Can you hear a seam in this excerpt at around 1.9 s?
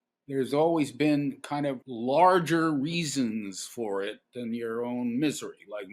yes; 1 cut; at 1.9 s

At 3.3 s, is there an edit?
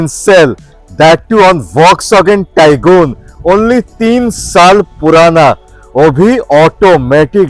no; 0 cuts

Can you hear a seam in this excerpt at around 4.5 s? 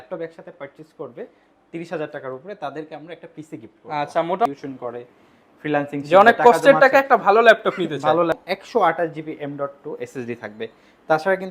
yes; 2 cuts; at 4.5 s, 8.4 s

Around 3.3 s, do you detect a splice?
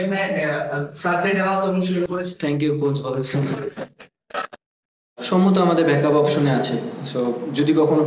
no; 1 cut; at 5.2 s

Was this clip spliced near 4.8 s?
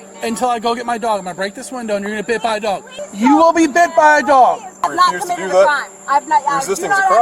yes; 1 cut; at 4.8 s

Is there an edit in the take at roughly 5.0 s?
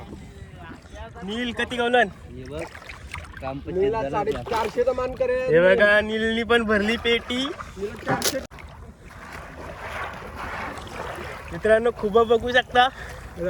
no; 1 cut; at 8.4 s

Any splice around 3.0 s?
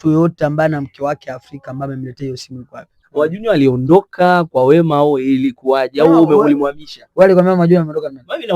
yes; 1 cut; at 3.0 s

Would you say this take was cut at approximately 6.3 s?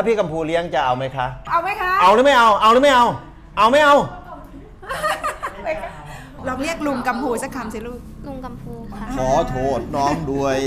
yes; 2 cuts; at 1.4 s, 6.3 s

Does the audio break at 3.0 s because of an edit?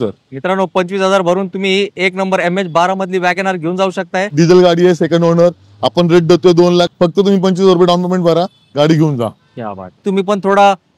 no; 3 cuts; at 4.3 s, 6.9 s, 10.0 s

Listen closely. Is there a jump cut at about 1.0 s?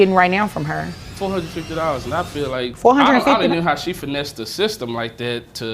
yes; 2 cuts; at 1.0 s, 2.7 s

